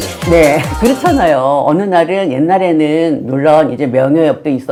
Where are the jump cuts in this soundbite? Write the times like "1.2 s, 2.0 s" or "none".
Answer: none